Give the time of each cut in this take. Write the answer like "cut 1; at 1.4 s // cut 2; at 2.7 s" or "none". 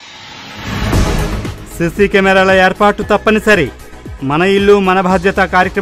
cut 1; at 1.5 s